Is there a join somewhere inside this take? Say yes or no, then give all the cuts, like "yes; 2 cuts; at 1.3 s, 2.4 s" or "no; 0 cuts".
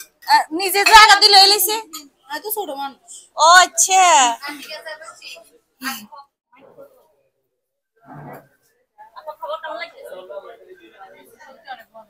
yes; 1 cut; at 6.4 s